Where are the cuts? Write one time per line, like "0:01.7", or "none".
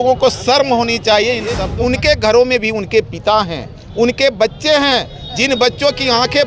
0:01.6